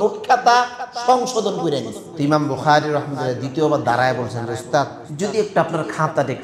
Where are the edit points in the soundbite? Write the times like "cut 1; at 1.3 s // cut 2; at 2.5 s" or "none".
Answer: cut 1; at 2.0 s // cut 2; at 5.0 s